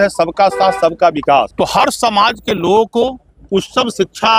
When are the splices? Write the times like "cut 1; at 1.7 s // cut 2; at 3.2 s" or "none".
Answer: cut 1; at 1.5 s